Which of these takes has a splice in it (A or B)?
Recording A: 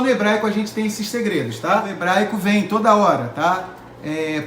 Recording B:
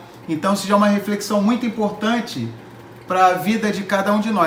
A